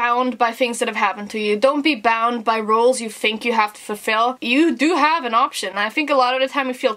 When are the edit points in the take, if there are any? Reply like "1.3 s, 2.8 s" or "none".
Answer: 4.4 s